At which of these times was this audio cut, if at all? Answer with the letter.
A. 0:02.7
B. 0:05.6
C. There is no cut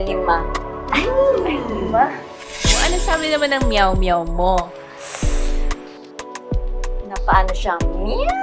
A